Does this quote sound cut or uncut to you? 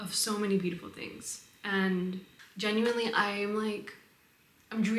cut